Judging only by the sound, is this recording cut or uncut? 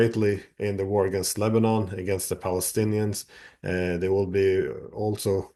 uncut